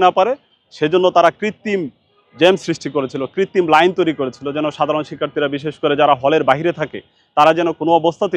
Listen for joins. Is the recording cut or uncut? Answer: uncut